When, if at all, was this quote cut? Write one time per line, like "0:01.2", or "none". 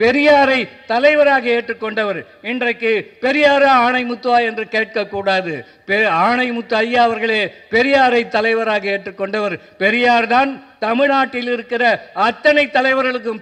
none